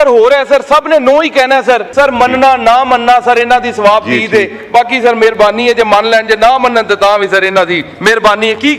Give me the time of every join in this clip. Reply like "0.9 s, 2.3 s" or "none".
1.9 s